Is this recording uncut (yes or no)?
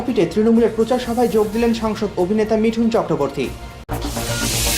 no